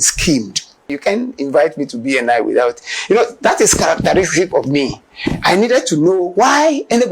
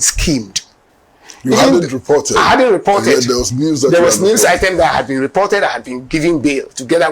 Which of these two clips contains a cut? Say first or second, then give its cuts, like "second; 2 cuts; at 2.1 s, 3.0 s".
first; 1 cut; at 1.0 s